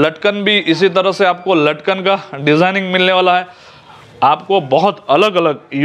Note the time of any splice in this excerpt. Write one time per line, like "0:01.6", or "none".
none